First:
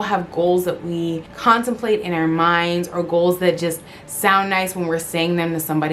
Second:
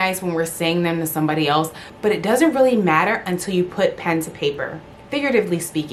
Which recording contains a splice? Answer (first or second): first